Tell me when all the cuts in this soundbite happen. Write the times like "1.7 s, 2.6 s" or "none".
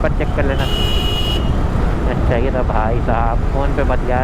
none